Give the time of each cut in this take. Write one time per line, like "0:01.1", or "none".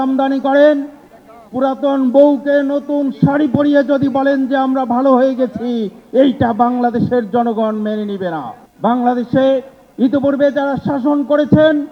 0:08.6